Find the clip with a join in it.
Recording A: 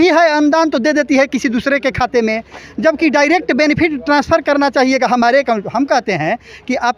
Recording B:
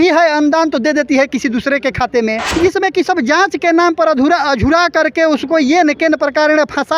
B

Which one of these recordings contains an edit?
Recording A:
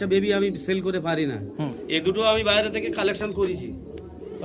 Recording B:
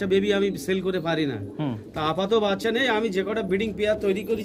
A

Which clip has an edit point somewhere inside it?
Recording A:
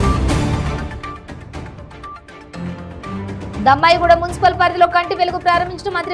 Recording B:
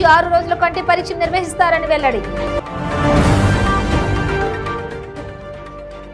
A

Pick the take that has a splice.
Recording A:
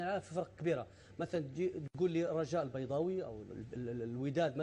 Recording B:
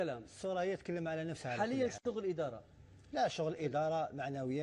A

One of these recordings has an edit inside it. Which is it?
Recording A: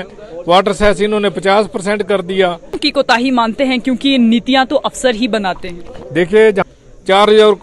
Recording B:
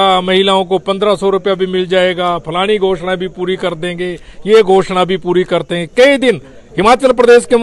A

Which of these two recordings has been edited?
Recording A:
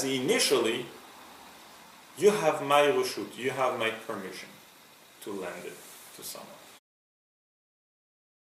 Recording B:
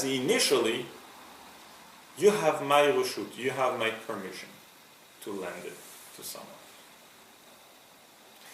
B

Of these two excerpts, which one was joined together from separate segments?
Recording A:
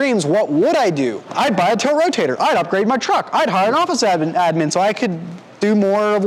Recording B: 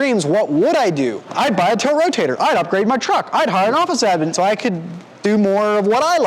B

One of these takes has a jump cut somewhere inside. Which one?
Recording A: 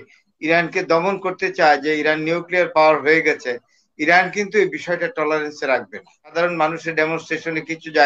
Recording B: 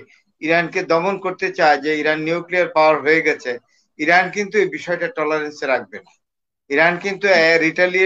A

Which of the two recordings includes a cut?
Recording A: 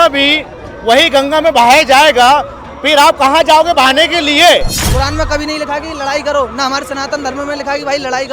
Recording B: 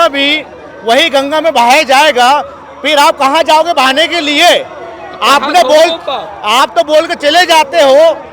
A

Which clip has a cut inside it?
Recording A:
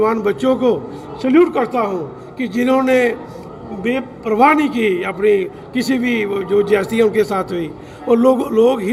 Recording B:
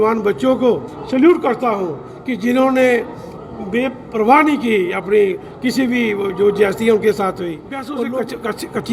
B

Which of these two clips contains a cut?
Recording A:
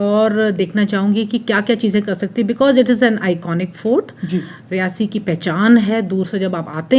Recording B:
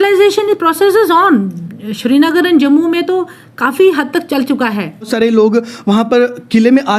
B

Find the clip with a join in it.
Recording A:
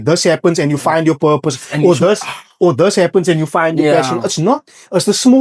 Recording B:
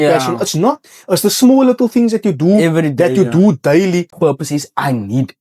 B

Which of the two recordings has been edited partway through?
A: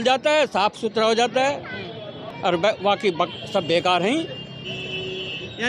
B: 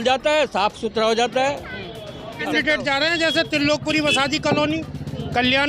B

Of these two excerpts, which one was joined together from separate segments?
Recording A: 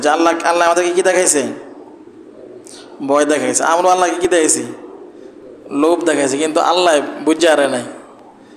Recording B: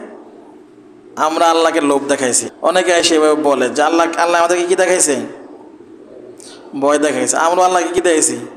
B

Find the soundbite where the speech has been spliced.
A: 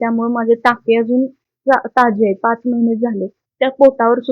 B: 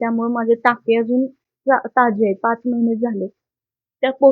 A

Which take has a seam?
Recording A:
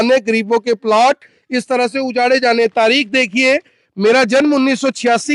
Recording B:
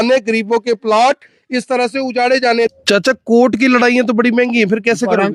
B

